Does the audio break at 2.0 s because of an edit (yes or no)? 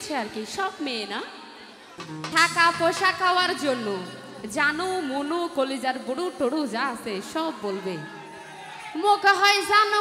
yes